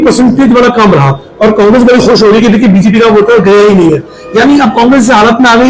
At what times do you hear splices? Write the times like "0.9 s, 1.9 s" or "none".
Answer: none